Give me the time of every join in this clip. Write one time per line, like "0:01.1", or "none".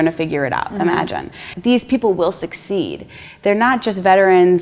0:01.5